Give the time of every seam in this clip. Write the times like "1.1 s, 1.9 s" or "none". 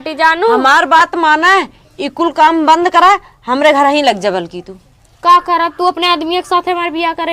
none